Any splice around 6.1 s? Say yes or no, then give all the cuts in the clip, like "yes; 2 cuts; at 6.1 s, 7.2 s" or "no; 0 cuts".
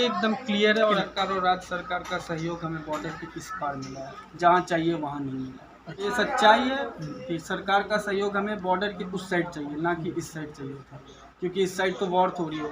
yes; 2 cuts; at 1.0 s, 6.1 s